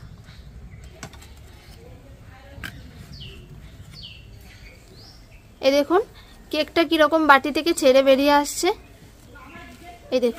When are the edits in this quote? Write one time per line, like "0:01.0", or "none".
0:00.9
0:02.6
0:04.7